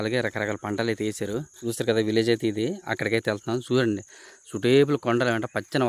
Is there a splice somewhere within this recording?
yes; 1 cut; at 1.5 s

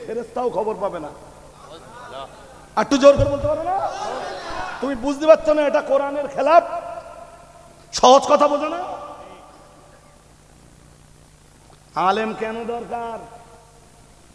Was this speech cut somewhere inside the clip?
no; 0 cuts

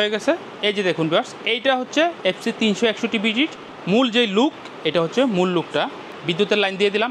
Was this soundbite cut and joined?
yes; 1 cut; at 3.7 s

